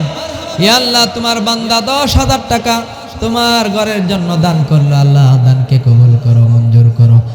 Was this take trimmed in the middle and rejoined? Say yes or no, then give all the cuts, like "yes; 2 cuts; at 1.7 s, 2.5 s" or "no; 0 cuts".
no; 0 cuts